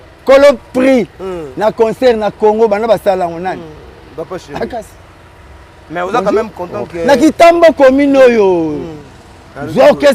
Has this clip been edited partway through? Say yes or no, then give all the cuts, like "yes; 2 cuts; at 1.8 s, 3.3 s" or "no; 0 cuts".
no; 0 cuts